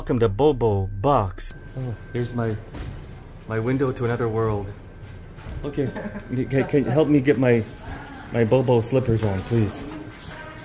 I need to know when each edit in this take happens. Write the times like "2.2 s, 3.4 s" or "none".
1.4 s